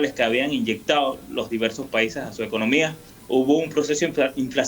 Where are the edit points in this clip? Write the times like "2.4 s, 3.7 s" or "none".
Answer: 3.1 s